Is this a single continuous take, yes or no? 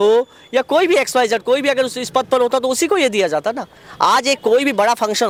yes